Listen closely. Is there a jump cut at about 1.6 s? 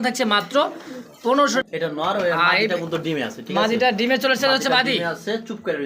yes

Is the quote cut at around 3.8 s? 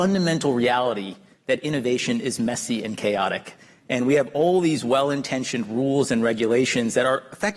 no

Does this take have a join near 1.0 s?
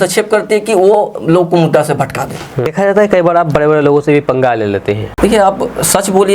no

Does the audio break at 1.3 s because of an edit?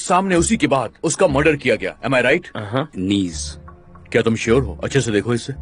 no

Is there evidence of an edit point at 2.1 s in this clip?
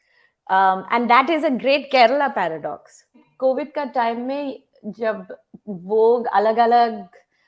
no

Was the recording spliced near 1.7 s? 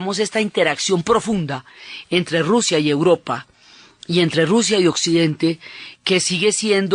yes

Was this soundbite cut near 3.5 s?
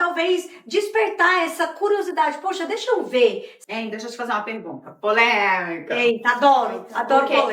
yes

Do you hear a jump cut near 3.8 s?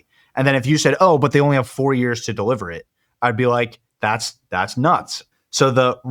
yes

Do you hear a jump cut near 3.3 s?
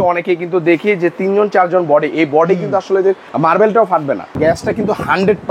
yes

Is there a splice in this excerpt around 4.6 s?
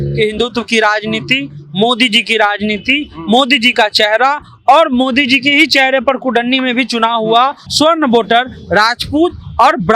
no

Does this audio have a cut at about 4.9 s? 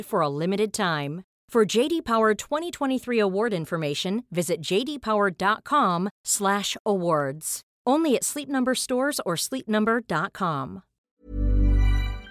no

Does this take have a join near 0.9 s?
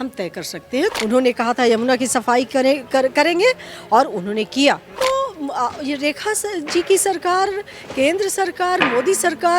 yes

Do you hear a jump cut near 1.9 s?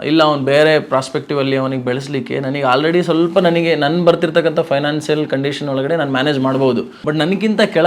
no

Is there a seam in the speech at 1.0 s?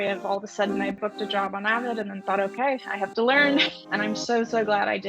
yes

